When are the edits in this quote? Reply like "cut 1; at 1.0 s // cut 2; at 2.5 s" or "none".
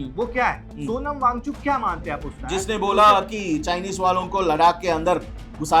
cut 1; at 2.4 s